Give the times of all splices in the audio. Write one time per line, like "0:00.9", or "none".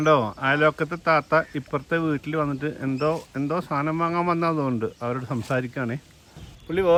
none